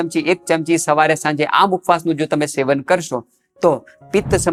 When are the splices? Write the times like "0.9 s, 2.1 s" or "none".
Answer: none